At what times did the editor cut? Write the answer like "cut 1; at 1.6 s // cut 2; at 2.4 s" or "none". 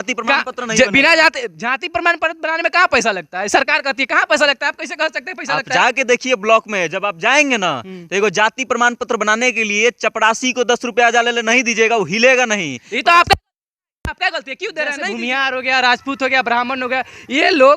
cut 1; at 15.1 s